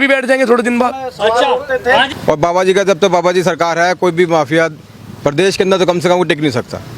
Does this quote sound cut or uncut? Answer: cut